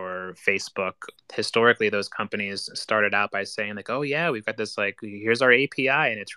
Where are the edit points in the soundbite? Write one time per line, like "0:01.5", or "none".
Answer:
0:01.1